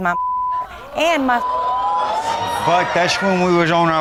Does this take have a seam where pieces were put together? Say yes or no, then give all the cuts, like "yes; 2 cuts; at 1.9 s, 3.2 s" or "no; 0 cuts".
no; 0 cuts